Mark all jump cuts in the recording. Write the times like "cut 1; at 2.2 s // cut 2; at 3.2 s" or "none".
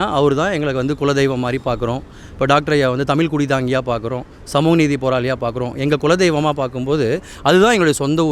none